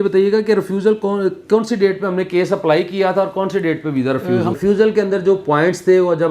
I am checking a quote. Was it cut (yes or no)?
yes